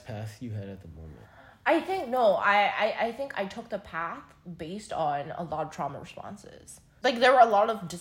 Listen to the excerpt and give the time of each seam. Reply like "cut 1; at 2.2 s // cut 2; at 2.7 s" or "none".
cut 1; at 6.9 s